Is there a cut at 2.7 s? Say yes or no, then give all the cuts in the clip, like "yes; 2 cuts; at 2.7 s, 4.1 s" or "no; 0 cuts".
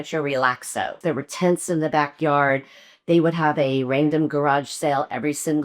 no; 1 cut; at 0.9 s